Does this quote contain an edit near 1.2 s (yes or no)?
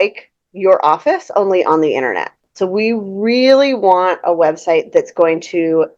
no